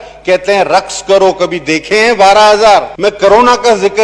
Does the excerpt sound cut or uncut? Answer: cut